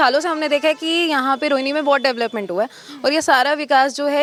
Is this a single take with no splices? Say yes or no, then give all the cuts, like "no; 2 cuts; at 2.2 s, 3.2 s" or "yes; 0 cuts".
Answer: yes; 0 cuts